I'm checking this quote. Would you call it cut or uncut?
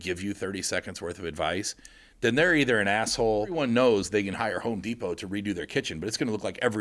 cut